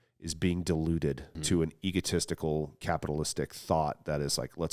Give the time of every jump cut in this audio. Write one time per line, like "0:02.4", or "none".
0:01.3
0:02.8